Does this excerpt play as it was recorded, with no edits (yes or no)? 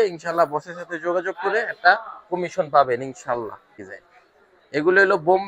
no